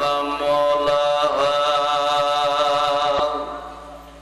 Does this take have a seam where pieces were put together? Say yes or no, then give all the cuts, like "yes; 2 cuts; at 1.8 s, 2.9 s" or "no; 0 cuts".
yes; 1 cut; at 3.2 s